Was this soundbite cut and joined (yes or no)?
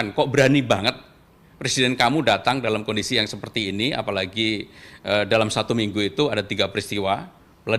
no